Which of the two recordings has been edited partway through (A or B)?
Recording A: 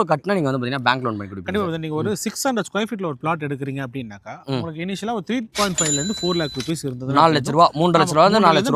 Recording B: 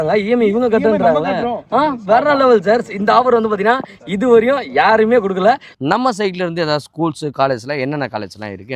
B